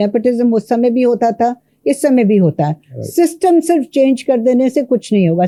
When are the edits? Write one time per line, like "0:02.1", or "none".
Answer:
none

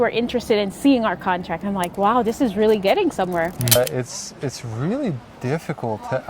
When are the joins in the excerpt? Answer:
0:03.8

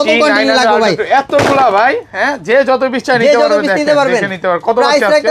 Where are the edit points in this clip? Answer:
none

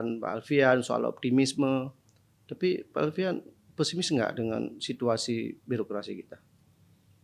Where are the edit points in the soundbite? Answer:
none

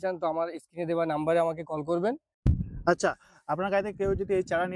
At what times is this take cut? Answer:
0:02.3

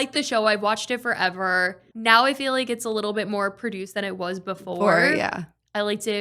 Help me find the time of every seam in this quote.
0:01.9

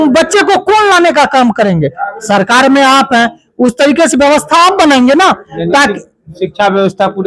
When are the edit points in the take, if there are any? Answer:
none

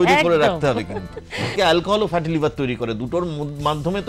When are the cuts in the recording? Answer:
0:01.5

